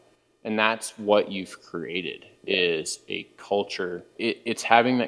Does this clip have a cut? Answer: yes; 1 cut; at 4.1 s

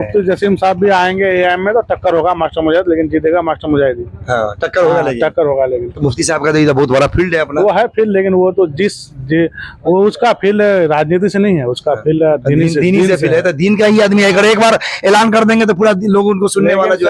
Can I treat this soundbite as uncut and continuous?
yes; 0 cuts

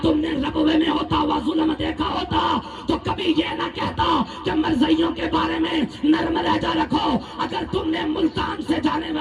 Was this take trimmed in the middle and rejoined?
no; 0 cuts

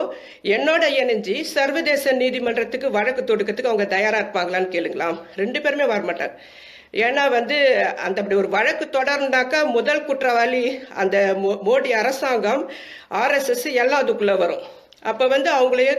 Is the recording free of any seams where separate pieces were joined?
yes; 0 cuts

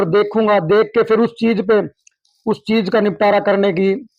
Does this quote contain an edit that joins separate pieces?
no; 0 cuts

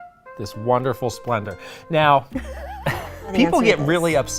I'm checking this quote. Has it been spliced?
yes; 1 cut; at 3.3 s

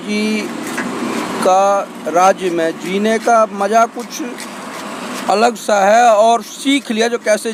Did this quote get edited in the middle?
no; 0 cuts

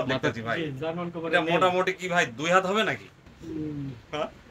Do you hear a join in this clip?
no; 0 cuts

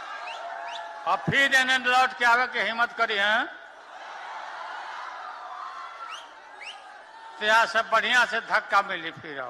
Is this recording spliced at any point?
no; 0 cuts

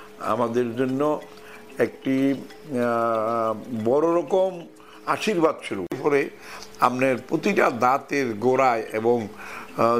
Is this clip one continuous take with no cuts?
no; 1 cut; at 6.0 s

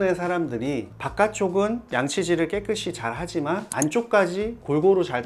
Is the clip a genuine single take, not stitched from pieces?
yes; 0 cuts

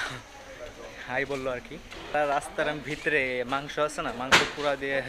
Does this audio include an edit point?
yes; 1 cut; at 1.9 s

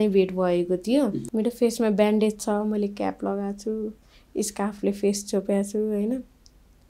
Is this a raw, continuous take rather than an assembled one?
no; 1 cut; at 1.2 s

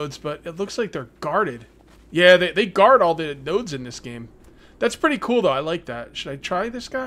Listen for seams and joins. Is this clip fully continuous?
yes; 0 cuts

